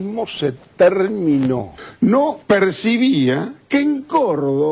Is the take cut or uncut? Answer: cut